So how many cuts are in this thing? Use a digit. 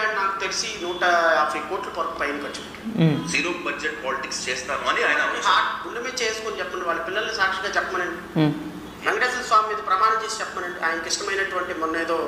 0